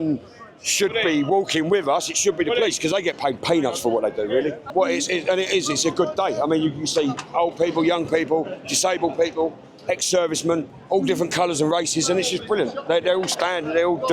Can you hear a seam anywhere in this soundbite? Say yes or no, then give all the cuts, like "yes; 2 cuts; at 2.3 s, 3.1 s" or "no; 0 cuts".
yes; 2 cuts; at 4.6 s, 10.7 s